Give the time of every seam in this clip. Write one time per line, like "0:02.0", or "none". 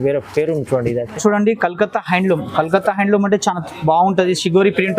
0:01.2

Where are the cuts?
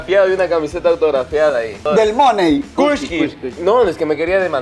0:01.9
0:02.7

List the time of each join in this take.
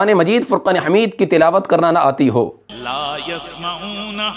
none

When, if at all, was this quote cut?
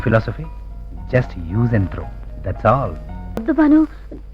0:03.4

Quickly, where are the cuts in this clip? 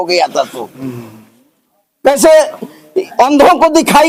none

